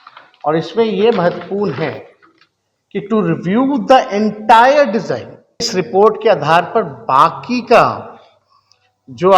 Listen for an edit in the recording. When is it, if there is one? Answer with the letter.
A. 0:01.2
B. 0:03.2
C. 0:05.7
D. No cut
C